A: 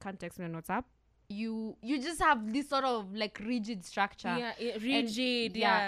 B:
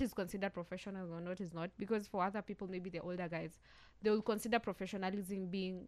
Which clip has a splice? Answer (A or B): A